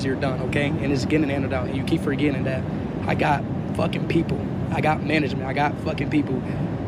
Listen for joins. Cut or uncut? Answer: uncut